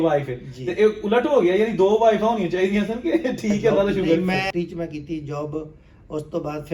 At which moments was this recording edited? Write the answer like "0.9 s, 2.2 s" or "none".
4.4 s

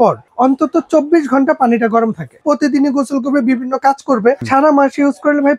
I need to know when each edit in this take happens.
2.4 s, 4.4 s

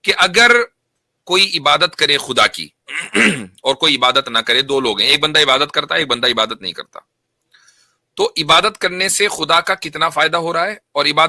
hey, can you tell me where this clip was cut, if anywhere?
none

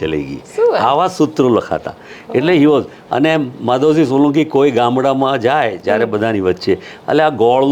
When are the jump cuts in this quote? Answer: none

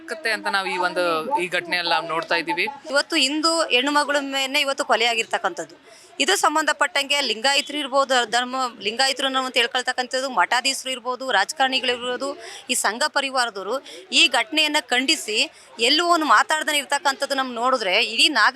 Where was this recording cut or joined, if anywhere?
2.8 s

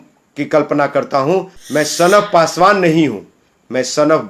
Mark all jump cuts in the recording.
1.5 s

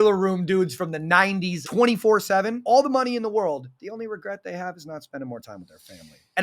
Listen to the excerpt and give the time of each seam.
1.6 s, 2.6 s, 3.9 s

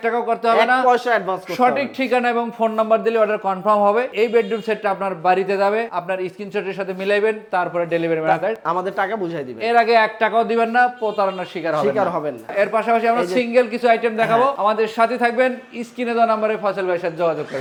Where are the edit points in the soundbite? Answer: none

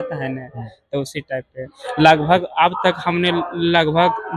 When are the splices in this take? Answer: none

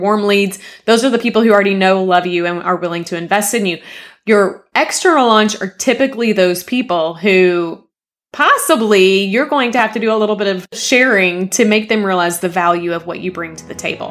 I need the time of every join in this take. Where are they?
none

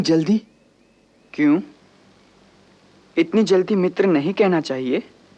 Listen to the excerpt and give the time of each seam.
none

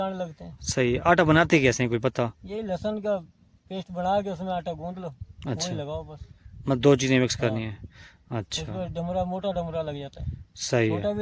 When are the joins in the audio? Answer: none

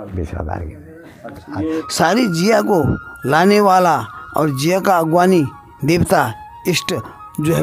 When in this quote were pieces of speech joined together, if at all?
1.8 s

